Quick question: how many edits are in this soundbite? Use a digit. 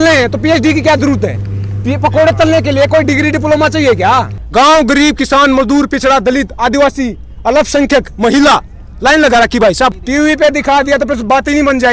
2